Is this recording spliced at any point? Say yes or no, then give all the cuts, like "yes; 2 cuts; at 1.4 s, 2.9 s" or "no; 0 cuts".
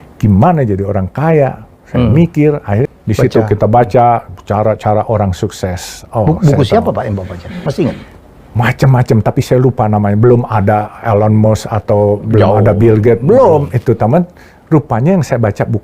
yes; 1 cut; at 2.9 s